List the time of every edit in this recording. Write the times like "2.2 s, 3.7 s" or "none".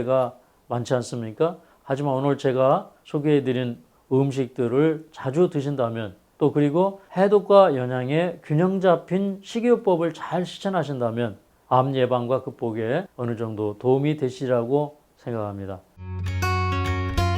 13.1 s, 16.0 s